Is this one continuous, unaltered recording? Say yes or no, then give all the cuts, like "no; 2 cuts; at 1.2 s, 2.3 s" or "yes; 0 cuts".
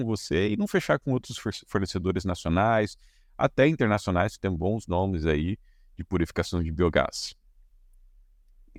yes; 0 cuts